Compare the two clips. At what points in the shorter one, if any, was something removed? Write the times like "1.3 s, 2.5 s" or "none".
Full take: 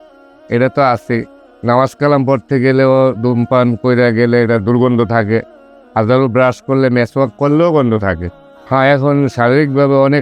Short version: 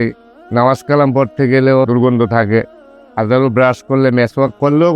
1.8 s